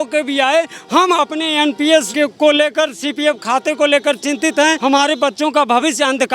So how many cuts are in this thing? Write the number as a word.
two